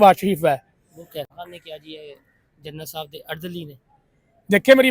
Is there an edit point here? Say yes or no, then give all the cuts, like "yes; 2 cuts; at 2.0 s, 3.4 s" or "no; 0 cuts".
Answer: yes; 1 cut; at 1.2 s